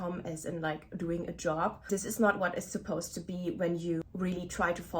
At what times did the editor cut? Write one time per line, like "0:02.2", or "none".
0:01.8
0:04.0